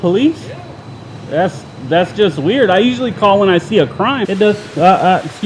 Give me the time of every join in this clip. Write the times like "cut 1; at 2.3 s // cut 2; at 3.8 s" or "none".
cut 1; at 4.2 s